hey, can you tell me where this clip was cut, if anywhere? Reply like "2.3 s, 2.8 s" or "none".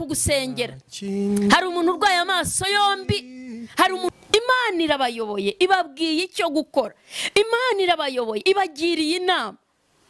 4.1 s